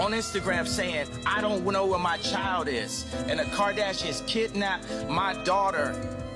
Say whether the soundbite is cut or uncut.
uncut